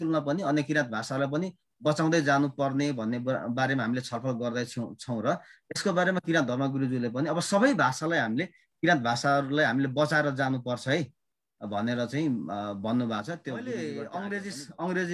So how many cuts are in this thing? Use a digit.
1